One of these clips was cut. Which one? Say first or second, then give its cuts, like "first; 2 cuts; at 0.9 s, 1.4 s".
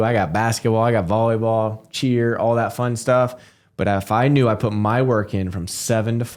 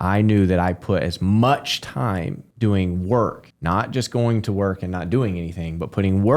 second; 2 cuts; at 2.4 s, 3.5 s